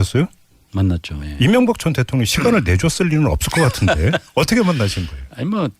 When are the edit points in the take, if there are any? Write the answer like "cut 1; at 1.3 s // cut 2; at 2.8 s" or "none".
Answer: cut 1; at 3.3 s

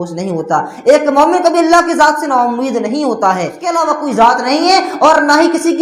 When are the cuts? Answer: cut 1; at 3.7 s

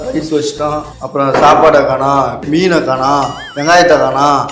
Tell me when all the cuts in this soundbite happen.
cut 1; at 0.9 s // cut 2; at 2.4 s

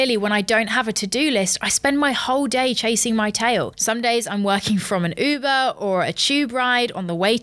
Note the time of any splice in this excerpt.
cut 1; at 3.8 s

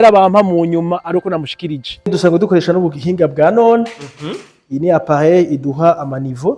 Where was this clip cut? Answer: cut 1; at 2.1 s

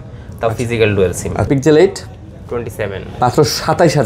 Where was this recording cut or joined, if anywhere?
cut 1; at 1.5 s

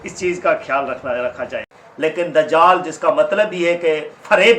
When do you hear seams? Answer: cut 1; at 2.1 s

